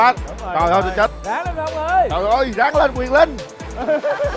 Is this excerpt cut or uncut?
uncut